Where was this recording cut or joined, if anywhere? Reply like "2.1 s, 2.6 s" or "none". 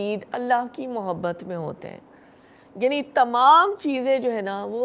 none